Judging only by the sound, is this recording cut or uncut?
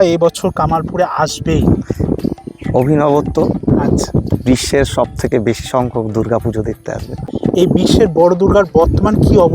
cut